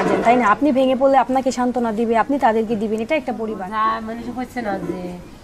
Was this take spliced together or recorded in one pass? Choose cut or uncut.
cut